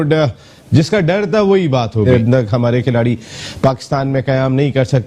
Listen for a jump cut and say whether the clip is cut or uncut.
cut